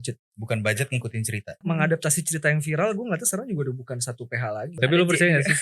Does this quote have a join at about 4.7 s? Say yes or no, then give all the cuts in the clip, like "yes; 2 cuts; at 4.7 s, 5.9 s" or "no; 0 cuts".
yes; 2 cuts; at 1.6 s, 4.7 s